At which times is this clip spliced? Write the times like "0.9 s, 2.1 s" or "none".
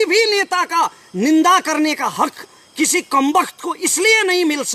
none